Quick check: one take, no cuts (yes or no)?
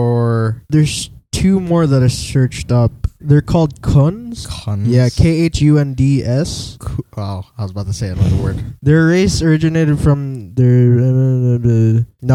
yes